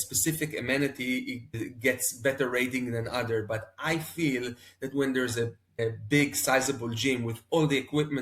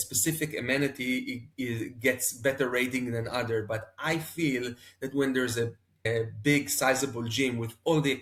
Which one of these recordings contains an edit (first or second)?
first